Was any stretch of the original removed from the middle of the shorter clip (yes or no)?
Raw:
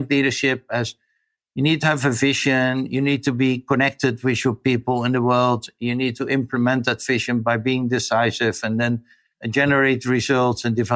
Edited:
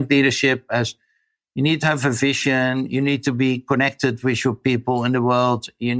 no